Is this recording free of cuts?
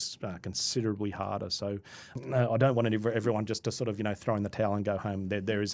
no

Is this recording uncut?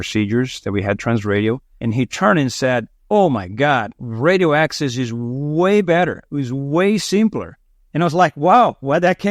no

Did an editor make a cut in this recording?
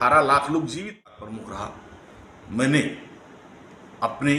yes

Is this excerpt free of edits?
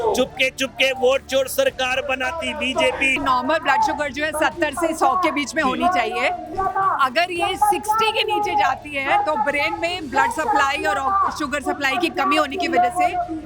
no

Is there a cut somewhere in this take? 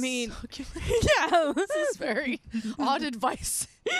no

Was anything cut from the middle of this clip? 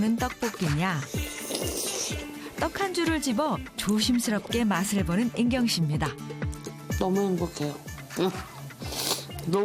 no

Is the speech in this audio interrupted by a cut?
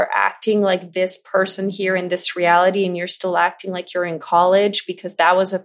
no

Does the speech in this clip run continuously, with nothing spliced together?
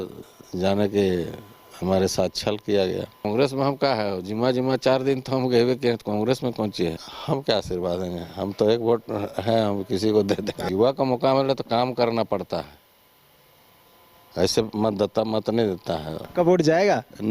no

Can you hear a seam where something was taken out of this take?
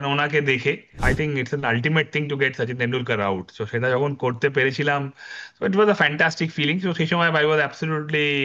yes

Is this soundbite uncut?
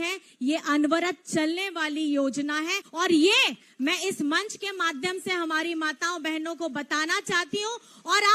no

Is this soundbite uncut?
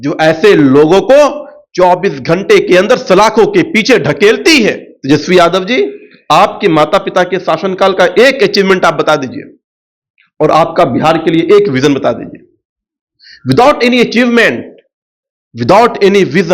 no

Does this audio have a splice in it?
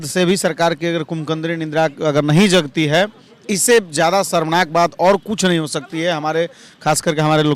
no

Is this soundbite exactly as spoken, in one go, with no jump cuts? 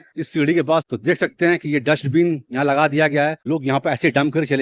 no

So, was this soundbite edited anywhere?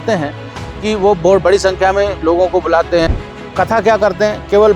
yes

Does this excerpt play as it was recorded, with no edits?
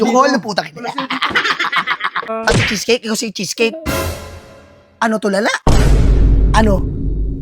no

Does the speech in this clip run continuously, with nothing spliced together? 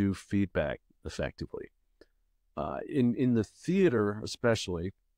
yes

